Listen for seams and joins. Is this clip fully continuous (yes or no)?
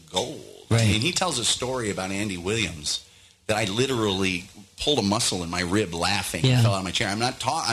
yes